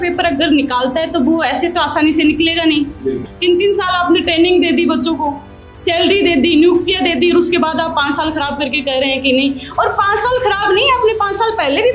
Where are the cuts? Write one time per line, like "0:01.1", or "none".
0:03.3